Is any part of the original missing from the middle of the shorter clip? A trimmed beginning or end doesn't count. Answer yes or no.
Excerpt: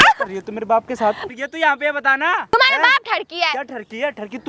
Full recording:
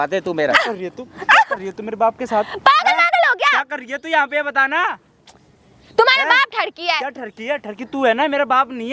yes